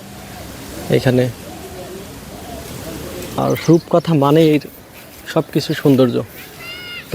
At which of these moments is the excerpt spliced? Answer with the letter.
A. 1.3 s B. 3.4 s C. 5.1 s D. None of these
B